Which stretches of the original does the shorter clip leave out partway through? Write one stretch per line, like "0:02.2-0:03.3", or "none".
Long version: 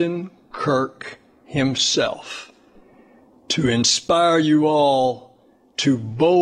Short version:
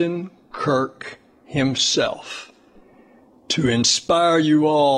none